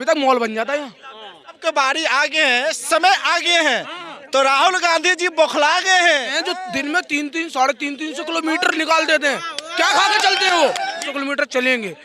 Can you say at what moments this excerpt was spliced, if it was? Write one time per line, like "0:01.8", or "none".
0:01.6
0:06.3
0:11.0